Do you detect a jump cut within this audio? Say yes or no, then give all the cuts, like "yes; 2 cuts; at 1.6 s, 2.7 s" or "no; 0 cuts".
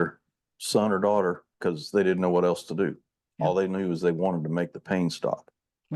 yes; 1 cut; at 1.5 s